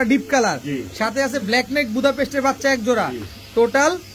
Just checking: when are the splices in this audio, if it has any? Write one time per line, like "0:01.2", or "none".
none